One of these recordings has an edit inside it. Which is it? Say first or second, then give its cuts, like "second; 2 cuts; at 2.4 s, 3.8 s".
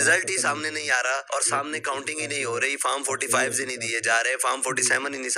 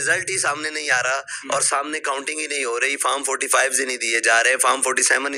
first; 1 cut; at 1.2 s